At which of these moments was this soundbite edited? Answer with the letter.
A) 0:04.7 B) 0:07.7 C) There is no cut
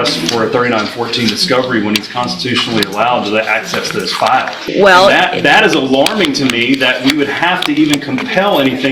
A